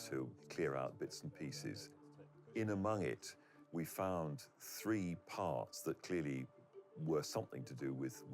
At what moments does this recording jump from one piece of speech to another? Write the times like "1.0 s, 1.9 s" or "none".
2.4 s